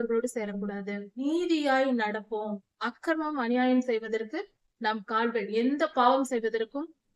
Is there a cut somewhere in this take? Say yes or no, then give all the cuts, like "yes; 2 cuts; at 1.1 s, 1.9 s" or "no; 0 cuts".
yes; 1 cut; at 1.2 s